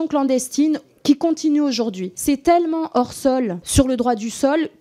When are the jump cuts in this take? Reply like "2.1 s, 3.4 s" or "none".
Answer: 2.1 s, 3.6 s

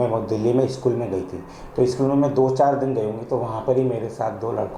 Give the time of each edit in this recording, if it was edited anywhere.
none

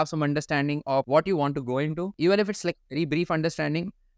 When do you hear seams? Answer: 1.1 s, 2.1 s

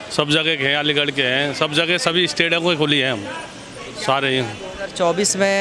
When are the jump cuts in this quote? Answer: none

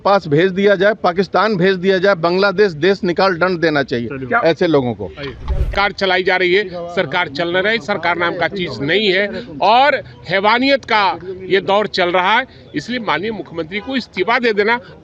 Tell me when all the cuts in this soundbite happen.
5.7 s

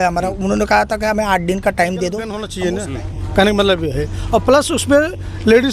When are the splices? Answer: 2.4 s

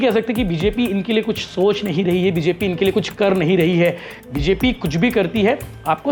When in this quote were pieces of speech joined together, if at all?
none

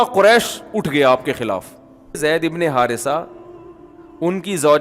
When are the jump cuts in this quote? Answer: 2.2 s

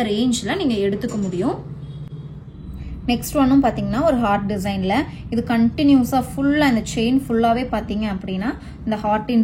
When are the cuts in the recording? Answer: none

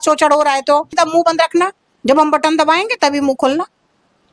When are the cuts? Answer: 0.9 s

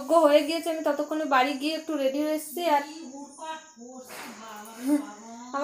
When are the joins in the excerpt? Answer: none

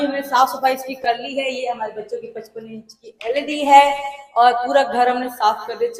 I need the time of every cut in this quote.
none

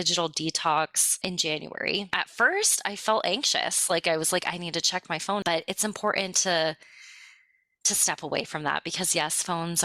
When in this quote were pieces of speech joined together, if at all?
1.2 s, 2.2 s, 5.4 s

